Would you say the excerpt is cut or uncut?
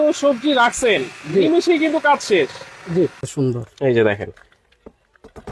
cut